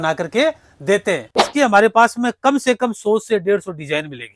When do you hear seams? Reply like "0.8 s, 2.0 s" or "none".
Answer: 1.3 s